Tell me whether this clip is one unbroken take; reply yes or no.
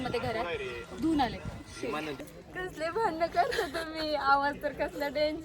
no